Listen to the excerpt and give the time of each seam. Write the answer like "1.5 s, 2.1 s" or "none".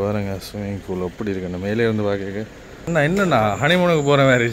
2.9 s